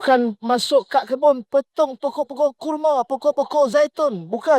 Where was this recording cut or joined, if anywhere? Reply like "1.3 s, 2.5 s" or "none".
none